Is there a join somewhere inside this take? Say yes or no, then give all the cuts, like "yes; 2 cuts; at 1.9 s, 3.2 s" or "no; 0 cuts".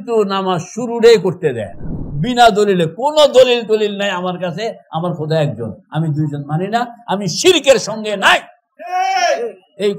yes; 1 cut; at 2.0 s